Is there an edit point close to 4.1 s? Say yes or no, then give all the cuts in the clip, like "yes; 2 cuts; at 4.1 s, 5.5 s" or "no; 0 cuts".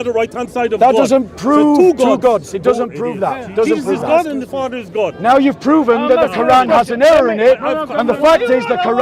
no; 0 cuts